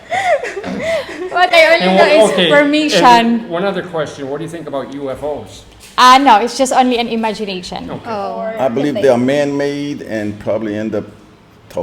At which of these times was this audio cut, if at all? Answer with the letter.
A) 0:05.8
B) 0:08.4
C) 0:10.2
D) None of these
B